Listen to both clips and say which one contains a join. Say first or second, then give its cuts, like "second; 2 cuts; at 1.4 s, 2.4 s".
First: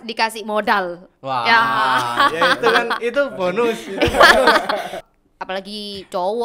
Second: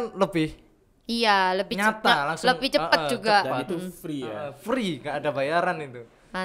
first; 1 cut; at 4.9 s